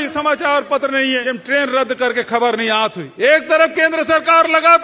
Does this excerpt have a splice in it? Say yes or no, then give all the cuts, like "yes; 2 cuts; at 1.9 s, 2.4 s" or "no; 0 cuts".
yes; 2 cuts; at 1.3 s, 3.0 s